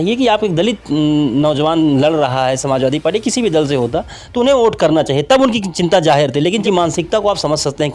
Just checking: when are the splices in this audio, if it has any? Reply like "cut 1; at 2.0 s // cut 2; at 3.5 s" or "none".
cut 1; at 6.6 s